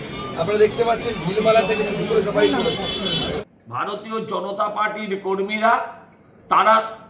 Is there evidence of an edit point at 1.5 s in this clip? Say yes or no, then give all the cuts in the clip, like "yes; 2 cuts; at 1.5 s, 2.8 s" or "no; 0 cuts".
no; 1 cut; at 3.5 s